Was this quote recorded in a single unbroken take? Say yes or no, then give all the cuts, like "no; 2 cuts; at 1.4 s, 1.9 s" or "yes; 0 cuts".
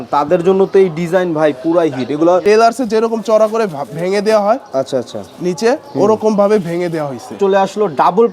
no; 2 cuts; at 2.4 s, 7.4 s